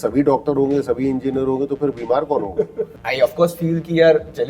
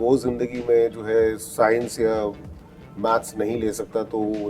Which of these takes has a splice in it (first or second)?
first